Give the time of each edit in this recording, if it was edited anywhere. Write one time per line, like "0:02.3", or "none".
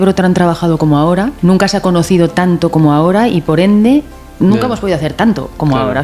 0:01.3